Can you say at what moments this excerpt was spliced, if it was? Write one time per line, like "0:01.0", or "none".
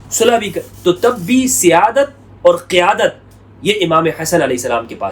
none